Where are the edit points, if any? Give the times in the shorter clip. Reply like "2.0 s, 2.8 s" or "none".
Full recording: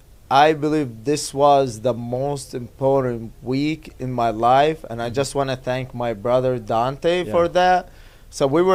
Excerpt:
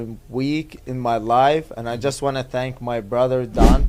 none